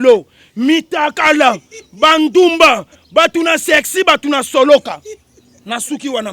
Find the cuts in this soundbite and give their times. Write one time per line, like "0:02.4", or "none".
none